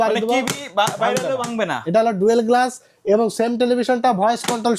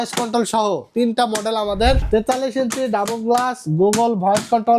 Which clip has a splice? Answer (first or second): second